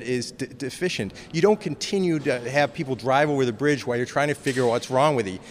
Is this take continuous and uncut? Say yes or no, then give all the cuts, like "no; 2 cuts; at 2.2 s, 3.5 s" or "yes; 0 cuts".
yes; 0 cuts